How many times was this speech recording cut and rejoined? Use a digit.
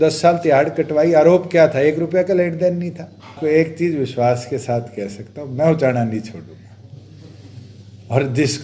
1